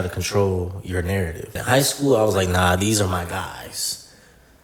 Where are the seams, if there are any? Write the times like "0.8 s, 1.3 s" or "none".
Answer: 1.6 s